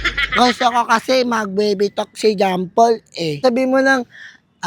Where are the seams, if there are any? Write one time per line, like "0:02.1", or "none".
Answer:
0:03.4